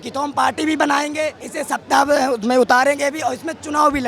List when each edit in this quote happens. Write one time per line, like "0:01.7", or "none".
0:01.5